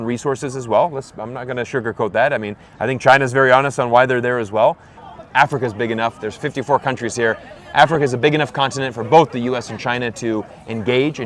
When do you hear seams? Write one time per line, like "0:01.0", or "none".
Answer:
0:04.9

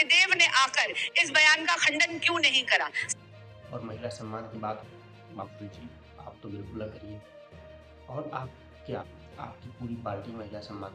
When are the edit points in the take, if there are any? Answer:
0:03.0

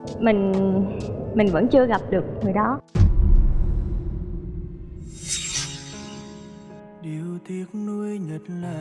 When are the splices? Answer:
none

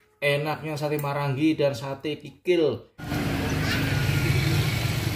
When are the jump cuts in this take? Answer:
0:03.0

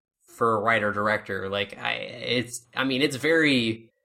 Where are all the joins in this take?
none

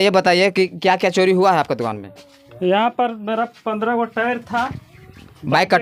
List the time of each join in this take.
none

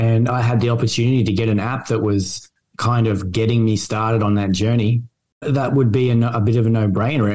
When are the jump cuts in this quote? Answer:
0:05.2

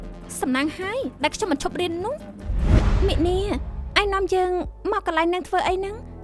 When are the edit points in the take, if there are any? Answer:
0:02.7

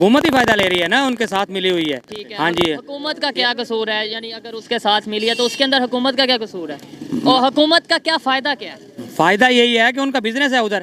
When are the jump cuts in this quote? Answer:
none

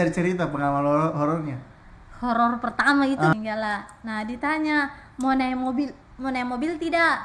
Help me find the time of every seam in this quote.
0:03.3

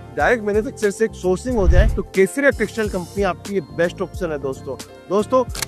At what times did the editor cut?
none

